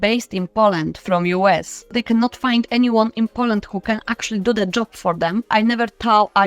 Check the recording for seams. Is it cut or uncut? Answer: cut